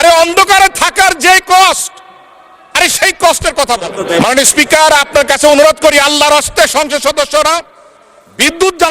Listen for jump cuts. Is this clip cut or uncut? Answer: cut